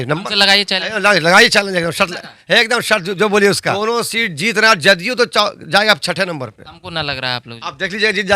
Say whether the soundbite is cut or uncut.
cut